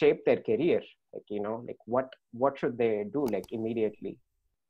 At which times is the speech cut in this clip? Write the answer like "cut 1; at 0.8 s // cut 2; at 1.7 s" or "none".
none